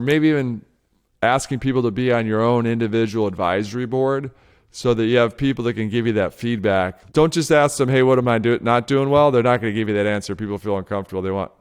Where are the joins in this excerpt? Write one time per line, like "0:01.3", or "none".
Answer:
0:07.0